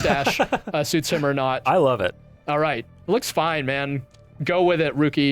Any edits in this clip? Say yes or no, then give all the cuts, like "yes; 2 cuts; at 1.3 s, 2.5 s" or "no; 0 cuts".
yes; 1 cut; at 1.6 s